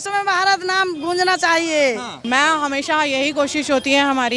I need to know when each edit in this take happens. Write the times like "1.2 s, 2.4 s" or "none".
2.3 s